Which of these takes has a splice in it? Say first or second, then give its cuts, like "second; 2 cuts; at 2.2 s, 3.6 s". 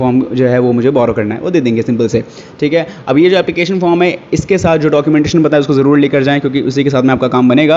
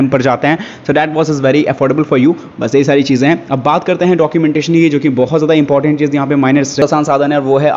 second; 1 cut; at 6.8 s